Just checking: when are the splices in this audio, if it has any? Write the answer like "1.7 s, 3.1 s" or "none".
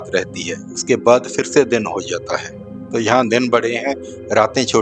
none

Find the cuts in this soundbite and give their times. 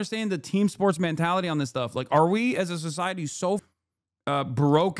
3.7 s

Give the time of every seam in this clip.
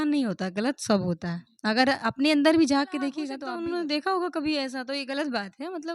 3.3 s

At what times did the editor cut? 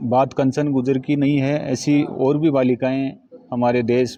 none

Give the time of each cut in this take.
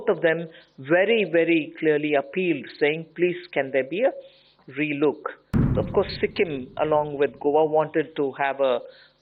5.7 s

